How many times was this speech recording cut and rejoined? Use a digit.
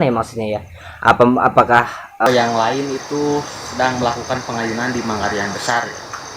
1